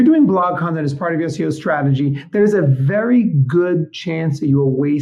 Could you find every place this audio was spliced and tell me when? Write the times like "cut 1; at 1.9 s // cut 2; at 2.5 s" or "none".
none